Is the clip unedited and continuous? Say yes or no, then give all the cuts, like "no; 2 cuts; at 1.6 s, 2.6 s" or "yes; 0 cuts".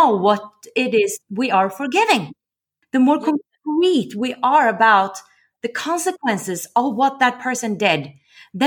no; 1 cut; at 2.8 s